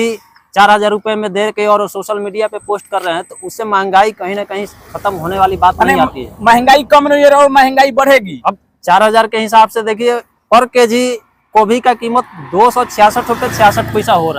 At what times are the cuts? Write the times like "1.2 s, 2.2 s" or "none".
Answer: none